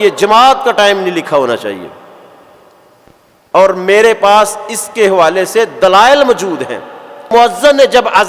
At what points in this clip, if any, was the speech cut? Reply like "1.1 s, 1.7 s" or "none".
7.3 s